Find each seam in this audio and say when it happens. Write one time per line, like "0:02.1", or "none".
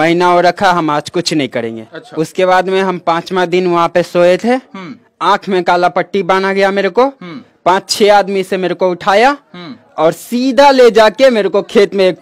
0:02.1